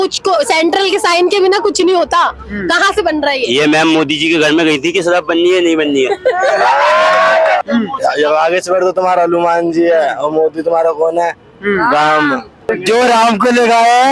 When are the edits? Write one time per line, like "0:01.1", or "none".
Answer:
0:07.6
0:12.7